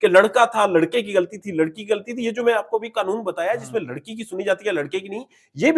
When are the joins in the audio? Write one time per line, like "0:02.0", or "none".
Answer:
none